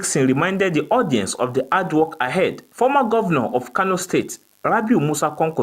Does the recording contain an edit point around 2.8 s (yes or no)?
no